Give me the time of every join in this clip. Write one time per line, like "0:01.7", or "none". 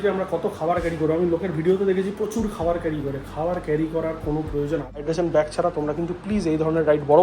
0:05.0